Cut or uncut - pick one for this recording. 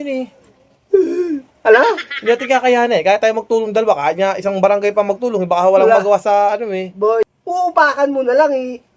cut